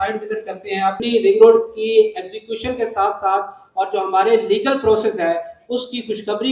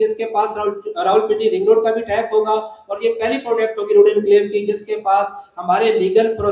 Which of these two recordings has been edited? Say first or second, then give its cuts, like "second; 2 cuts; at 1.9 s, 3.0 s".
first; 1 cut; at 1.0 s